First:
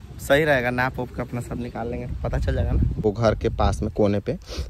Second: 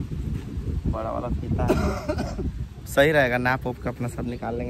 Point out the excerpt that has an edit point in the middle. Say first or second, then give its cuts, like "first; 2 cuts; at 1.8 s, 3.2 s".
first; 1 cut; at 3.0 s